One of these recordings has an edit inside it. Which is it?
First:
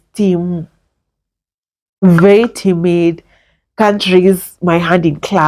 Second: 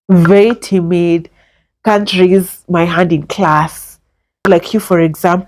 second; 1 cut; at 4.5 s

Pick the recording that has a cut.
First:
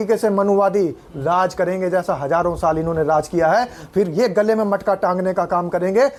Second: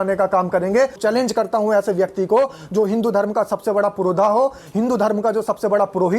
second; 1 cut; at 1.0 s

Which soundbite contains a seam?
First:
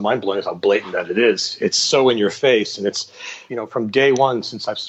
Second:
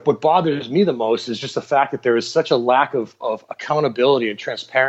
first; 1 cut; at 3.4 s

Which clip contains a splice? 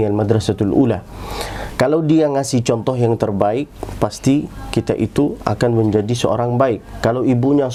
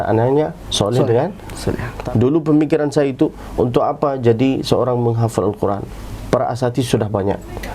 second; 1 cut; at 1.9 s

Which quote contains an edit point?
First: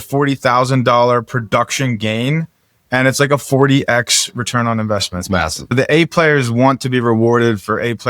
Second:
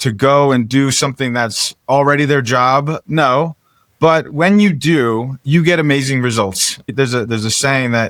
first; 1 cut; at 5.7 s

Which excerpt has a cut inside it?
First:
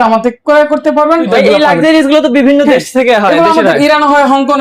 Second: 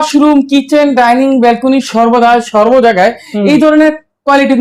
first; 1 cut; at 1.3 s

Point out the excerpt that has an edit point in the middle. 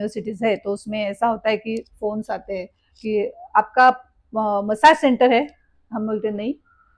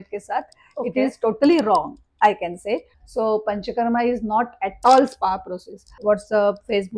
second; 2 cuts; at 2.9 s, 5.9 s

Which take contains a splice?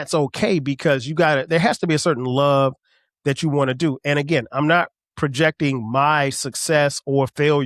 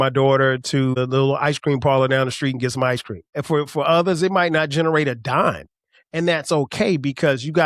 second; 2 cuts; at 0.9 s, 3.4 s

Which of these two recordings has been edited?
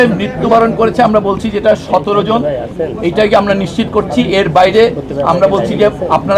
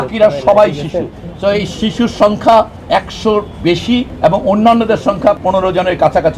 second; 4 cuts; at 1.2 s, 2.8 s, 4.1 s, 5.4 s

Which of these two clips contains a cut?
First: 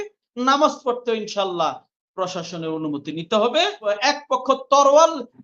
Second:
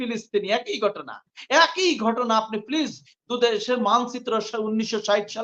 first; 1 cut; at 3.9 s

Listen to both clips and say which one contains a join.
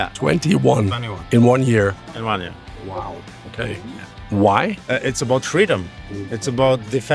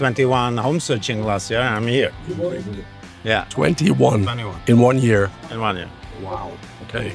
first; 1 cut; at 4.8 s

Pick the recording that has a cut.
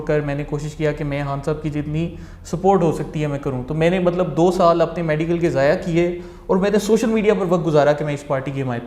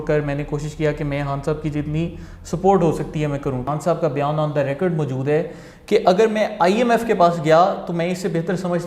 second; 1 cut; at 3.7 s

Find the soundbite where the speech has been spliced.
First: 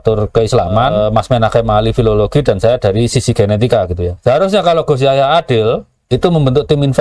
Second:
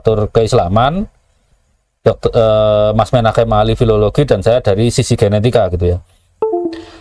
first; 3 cuts; at 0.9 s, 4.1 s, 5.9 s

